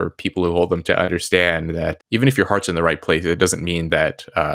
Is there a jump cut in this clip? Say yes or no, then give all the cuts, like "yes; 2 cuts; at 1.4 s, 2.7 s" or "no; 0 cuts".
yes; 2 cuts; at 0.8 s, 2.0 s